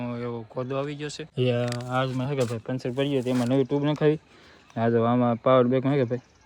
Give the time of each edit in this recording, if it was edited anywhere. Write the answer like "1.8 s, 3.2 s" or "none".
1.2 s